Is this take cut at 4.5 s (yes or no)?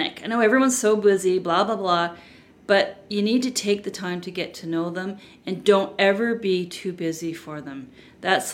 no